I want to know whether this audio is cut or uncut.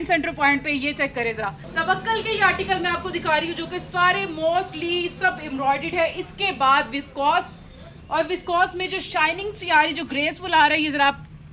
cut